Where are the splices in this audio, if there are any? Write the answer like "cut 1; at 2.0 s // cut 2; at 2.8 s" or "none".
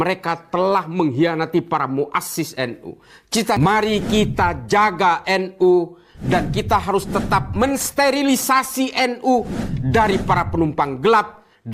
cut 1; at 3.6 s